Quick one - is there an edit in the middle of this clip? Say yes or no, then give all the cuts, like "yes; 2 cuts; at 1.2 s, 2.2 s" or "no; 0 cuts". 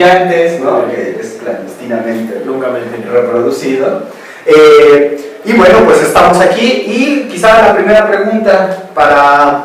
yes; 1 cut; at 3.0 s